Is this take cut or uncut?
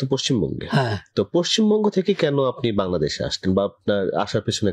uncut